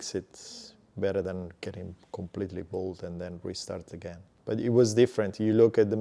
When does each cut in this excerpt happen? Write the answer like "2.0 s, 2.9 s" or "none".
4.3 s